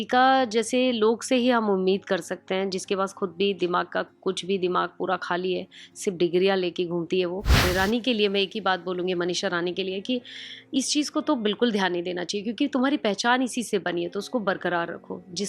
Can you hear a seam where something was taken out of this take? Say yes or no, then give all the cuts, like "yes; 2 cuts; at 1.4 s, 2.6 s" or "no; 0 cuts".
yes; 1 cut; at 7.6 s